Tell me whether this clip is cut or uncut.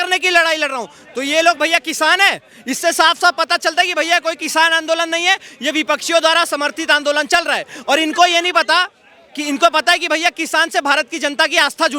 uncut